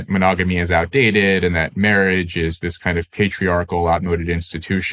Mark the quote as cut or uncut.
uncut